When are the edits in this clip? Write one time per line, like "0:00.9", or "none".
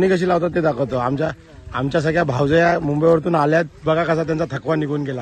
none